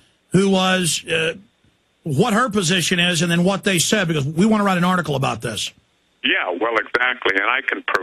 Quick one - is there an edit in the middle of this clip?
no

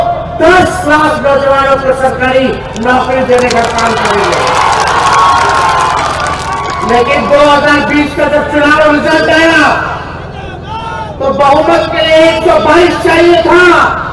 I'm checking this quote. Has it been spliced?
no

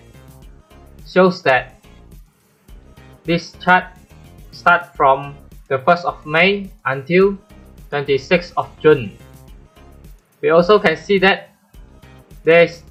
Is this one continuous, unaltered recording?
yes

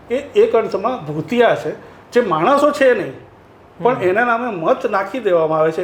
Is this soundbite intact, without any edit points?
yes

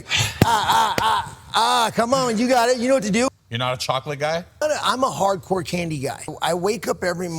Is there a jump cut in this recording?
yes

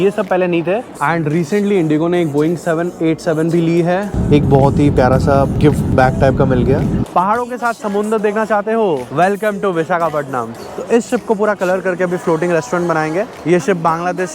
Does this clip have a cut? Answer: yes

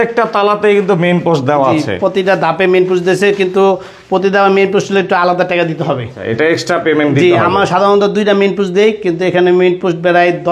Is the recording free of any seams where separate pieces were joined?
yes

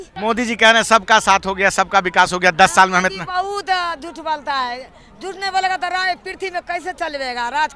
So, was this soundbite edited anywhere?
no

